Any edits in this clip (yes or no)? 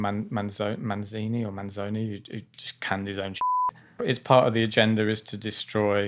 yes